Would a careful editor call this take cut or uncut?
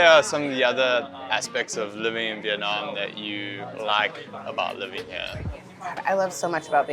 uncut